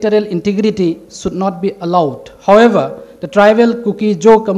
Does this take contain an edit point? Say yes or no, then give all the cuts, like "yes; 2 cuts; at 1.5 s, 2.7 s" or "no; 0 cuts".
no; 0 cuts